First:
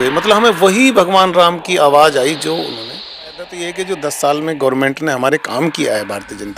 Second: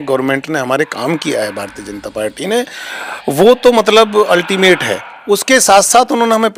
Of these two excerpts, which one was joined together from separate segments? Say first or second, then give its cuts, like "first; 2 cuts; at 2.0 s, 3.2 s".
first; 1 cut; at 3.4 s